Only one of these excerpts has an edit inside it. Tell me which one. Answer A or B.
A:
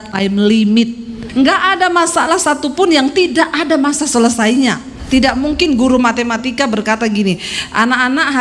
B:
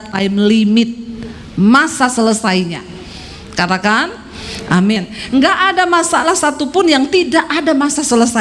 A